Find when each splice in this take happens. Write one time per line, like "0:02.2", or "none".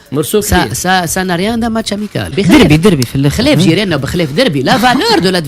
0:02.3